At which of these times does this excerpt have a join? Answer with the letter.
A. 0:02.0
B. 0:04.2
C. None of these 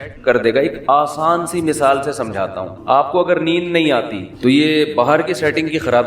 B